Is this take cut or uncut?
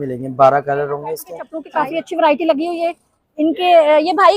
cut